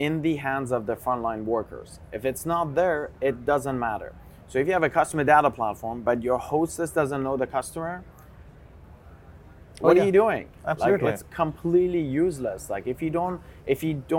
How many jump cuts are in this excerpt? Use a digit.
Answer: 0